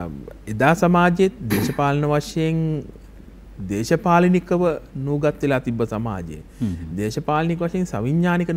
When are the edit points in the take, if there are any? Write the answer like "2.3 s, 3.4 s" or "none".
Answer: none